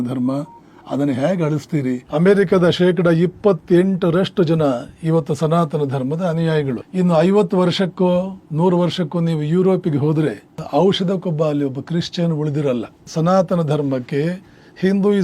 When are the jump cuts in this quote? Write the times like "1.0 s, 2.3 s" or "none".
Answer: 2.0 s, 6.8 s, 8.4 s, 13.0 s